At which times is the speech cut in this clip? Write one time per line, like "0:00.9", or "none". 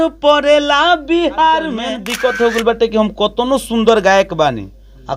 0:02.0